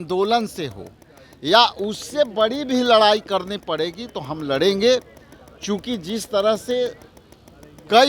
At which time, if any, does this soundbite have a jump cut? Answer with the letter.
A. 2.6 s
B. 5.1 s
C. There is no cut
C